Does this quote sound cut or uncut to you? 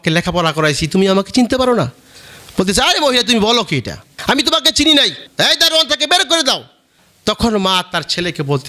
uncut